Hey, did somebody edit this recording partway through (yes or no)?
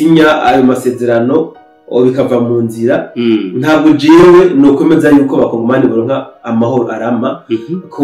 no